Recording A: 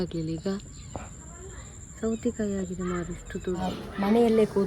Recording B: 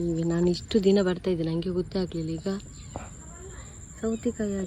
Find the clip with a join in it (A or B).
A